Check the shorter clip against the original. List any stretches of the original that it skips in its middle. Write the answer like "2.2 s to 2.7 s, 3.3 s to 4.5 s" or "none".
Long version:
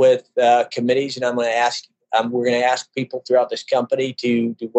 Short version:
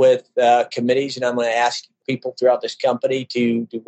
2.0 s to 2.9 s